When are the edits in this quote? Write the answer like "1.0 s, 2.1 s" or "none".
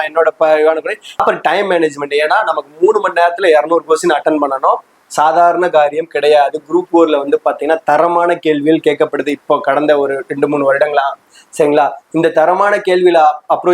1.2 s